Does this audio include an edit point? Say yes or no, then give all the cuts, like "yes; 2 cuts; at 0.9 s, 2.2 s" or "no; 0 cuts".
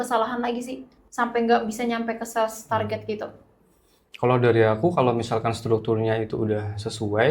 no; 0 cuts